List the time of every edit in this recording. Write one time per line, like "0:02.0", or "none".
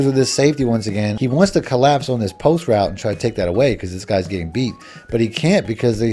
0:01.1